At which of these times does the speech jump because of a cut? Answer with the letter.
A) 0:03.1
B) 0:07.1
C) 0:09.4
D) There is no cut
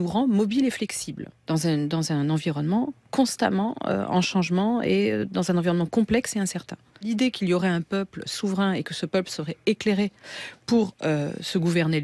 B